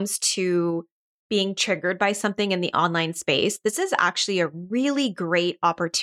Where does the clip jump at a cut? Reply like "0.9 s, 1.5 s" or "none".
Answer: none

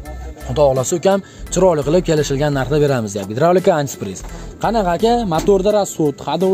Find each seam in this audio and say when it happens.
none

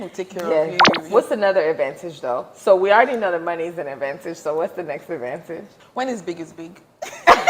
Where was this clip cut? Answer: 0.9 s, 5.8 s

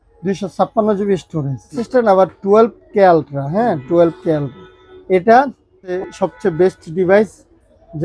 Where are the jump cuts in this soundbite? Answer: 1.8 s, 6.0 s

